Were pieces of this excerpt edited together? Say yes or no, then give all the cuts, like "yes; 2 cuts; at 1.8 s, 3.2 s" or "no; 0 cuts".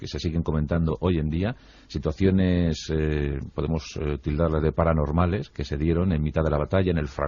yes; 1 cut; at 4.1 s